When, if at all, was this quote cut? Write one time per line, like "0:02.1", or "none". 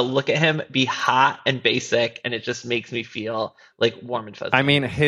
none